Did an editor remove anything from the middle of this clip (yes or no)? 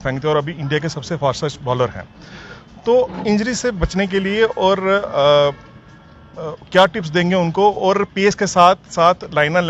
no